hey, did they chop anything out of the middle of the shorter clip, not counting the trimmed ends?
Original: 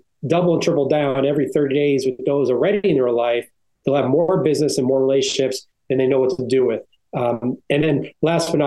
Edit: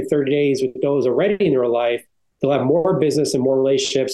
no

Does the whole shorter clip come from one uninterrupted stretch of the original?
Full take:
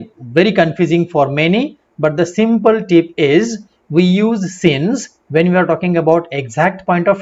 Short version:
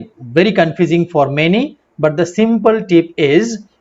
yes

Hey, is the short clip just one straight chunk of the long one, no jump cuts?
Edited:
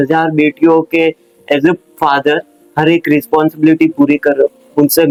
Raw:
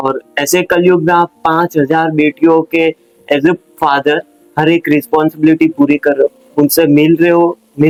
yes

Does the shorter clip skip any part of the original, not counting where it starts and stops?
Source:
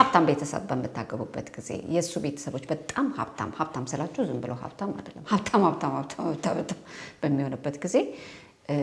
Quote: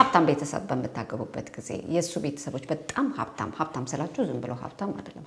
no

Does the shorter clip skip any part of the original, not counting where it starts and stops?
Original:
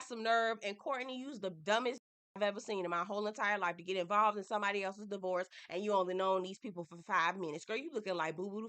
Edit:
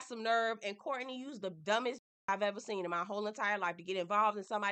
no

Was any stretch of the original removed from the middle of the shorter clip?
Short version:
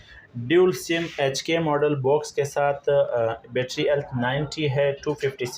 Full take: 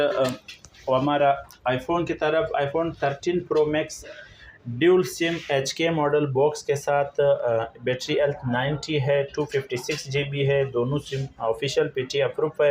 no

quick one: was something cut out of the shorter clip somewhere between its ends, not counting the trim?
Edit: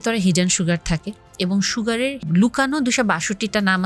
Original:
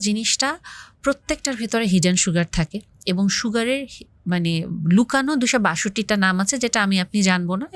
yes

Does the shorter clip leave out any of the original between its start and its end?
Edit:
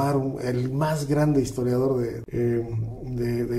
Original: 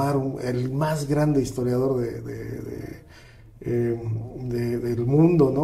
yes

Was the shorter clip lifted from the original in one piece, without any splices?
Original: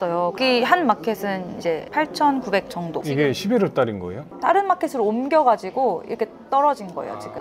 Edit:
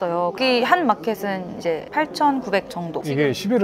yes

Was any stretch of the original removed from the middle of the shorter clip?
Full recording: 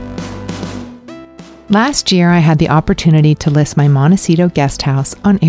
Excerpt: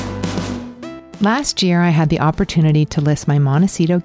yes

